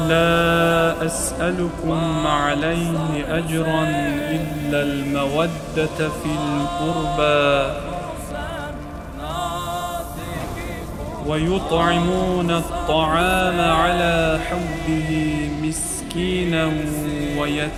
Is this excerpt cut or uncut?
uncut